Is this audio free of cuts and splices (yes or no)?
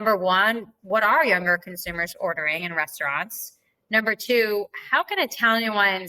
yes